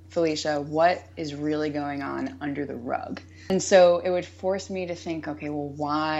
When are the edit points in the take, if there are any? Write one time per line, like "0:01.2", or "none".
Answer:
0:03.5